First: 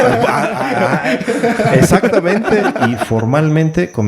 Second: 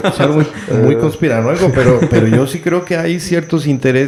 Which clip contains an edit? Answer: first; 1 cut; at 3.0 s

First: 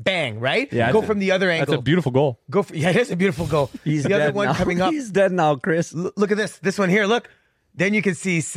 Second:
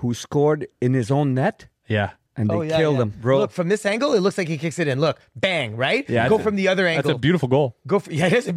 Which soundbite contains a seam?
second; 1 cut; at 3.2 s

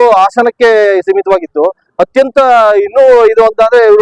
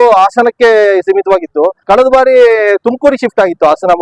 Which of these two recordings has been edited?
second; 1 cut; at 1.8 s

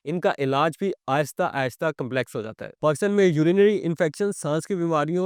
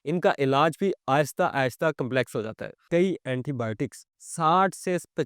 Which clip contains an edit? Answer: second; 1 cut; at 2.8 s

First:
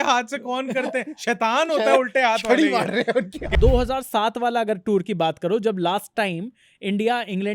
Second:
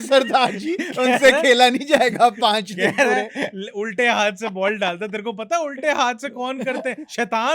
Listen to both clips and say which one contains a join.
first; 1 cut; at 3.5 s

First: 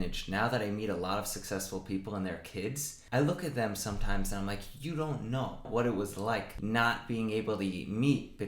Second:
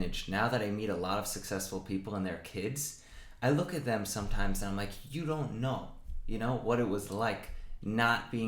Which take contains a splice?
first; 3 cuts; at 2.9 s, 5.7 s, 6.5 s

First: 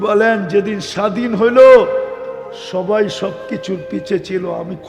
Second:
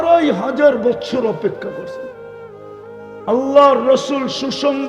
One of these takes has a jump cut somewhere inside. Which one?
second; 2 cuts; at 1.7 s, 3.3 s

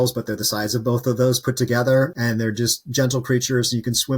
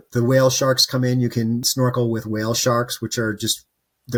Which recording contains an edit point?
first; 1 cut; at 2.1 s

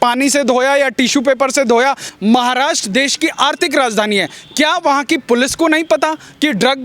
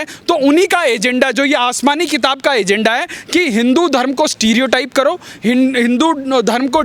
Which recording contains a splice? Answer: first; 1 cut; at 2.1 s

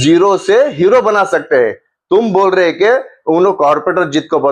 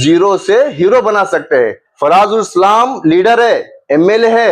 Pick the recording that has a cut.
second; 1 cut; at 1.8 s

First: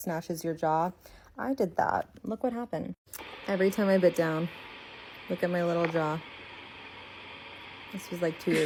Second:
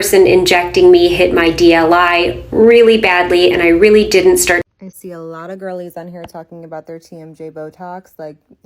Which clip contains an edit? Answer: second; 1 cut; at 4.6 s

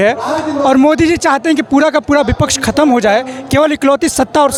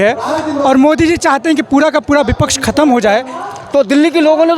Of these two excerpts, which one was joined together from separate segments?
second; 1 cut; at 3.4 s

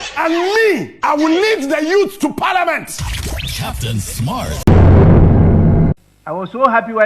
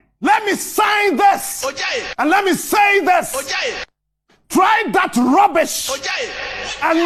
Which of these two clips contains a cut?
first; 1 cut; at 4.6 s

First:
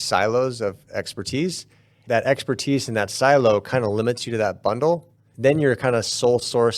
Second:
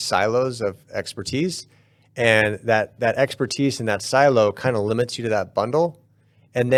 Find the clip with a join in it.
first; 2 cuts; at 2.0 s, 5.3 s

